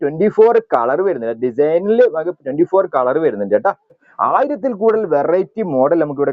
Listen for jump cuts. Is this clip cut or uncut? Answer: cut